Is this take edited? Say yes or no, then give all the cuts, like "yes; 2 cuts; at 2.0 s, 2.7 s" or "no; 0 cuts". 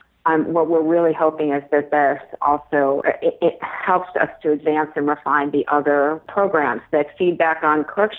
yes; 2 cuts; at 3.0 s, 6.2 s